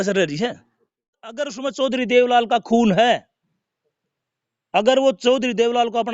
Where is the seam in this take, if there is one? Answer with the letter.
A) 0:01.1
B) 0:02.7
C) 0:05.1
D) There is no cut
A